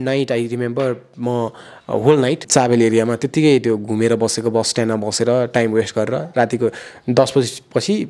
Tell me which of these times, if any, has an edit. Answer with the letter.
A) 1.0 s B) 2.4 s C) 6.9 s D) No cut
B